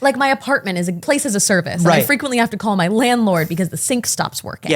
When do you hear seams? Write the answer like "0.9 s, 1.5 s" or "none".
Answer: 1.0 s